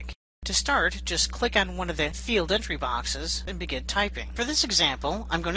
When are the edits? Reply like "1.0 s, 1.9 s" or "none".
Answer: 4.2 s